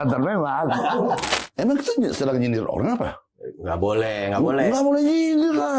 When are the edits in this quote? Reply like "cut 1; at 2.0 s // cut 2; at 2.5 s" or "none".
cut 1; at 1.2 s